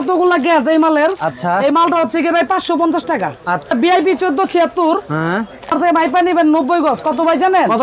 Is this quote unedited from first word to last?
no; 2 cuts; at 3.7 s, 5.7 s

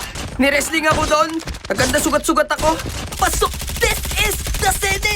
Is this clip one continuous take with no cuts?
no; 1 cut; at 3.2 s

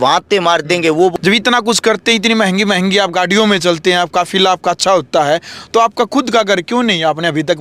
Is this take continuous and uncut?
no; 1 cut; at 1.1 s

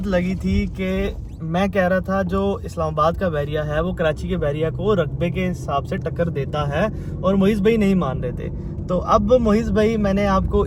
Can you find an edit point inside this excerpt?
no; 0 cuts

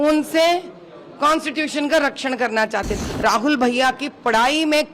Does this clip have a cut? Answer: yes; 1 cut; at 2.9 s

